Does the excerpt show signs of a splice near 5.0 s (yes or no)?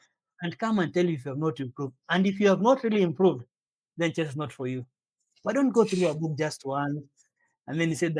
no